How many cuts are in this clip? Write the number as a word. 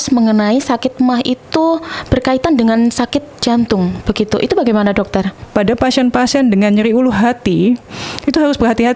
one